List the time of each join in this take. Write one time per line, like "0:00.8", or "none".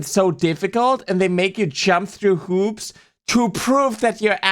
none